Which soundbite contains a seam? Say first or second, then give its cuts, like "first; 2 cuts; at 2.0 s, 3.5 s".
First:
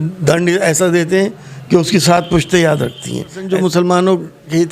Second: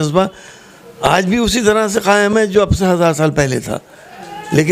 first; 1 cut; at 3.4 s